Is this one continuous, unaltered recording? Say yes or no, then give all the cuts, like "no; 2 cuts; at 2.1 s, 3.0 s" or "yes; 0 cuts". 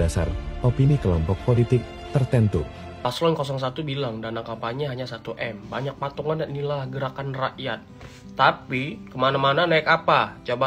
no; 1 cut; at 3.0 s